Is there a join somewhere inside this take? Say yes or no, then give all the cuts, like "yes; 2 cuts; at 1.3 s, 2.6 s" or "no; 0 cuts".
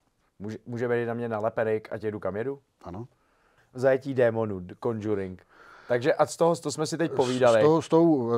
yes; 1 cut; at 3.6 s